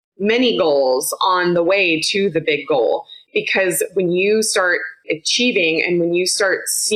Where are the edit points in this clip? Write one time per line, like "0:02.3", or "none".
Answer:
none